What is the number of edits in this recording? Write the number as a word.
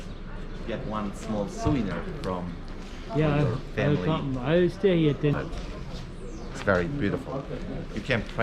one